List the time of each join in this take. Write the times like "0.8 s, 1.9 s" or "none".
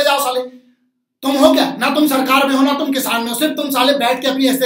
none